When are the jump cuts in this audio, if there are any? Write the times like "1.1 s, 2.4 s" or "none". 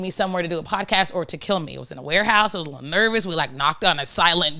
none